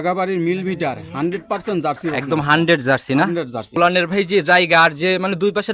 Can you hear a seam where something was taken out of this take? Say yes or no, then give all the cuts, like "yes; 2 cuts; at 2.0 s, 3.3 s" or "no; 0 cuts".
yes; 1 cut; at 3.6 s